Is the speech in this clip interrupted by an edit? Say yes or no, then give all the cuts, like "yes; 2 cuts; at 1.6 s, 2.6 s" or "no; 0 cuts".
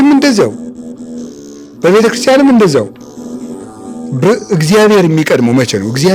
no; 0 cuts